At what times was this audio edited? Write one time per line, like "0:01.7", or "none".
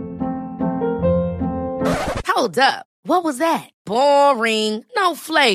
none